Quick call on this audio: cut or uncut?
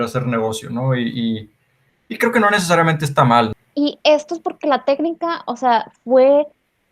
cut